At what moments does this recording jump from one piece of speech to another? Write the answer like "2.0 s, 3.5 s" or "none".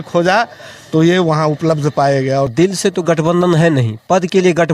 2.5 s